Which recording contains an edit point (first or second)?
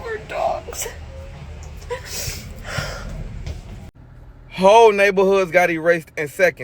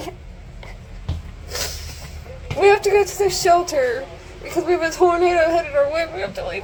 first